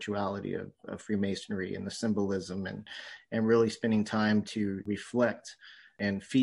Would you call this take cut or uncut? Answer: uncut